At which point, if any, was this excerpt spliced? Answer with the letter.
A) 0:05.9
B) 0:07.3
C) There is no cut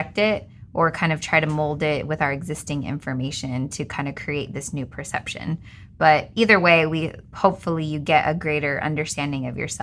C